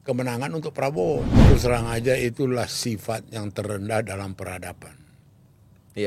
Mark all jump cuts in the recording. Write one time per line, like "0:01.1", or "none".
0:01.5

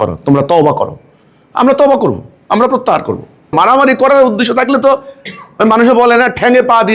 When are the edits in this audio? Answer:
0:03.5

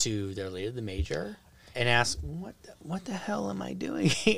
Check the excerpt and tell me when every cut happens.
0:01.7

